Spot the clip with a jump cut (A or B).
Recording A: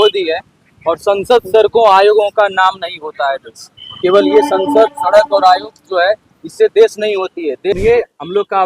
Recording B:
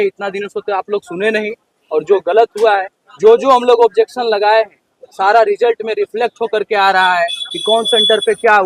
A